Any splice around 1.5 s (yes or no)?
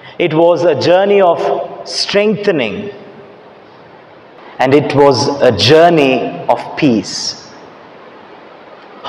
no